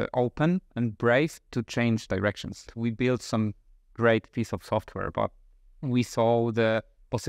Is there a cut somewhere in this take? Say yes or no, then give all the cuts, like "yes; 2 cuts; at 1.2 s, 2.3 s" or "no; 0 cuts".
yes; 1 cut; at 2.7 s